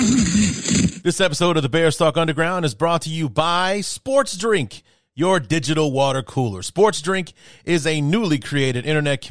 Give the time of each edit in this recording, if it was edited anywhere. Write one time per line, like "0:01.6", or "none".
0:00.9